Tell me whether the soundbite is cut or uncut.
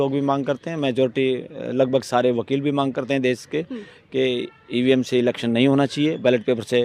uncut